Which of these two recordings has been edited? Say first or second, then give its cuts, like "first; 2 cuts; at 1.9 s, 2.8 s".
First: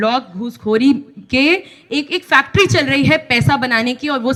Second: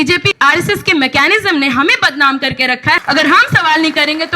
second; 1 cut; at 3.0 s